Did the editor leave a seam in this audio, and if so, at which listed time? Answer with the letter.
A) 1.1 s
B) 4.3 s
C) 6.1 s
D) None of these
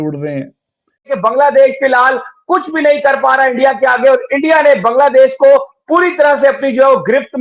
A